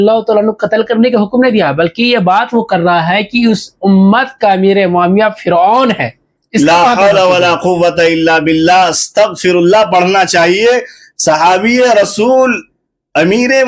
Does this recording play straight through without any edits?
yes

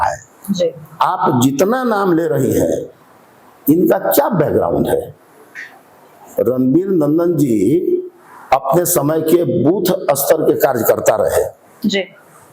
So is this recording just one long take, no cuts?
yes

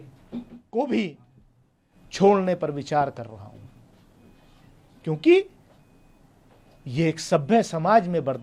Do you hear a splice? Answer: no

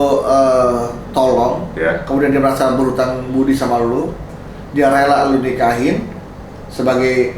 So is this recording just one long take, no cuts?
yes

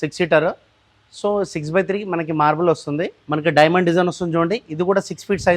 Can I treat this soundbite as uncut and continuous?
no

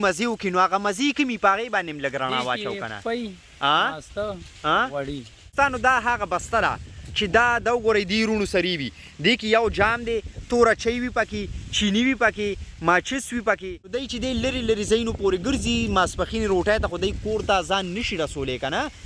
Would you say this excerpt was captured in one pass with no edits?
no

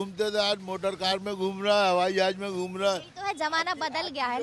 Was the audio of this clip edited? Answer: no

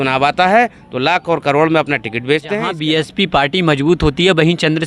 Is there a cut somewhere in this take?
yes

